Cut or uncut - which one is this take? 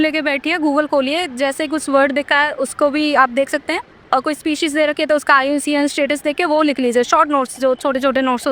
uncut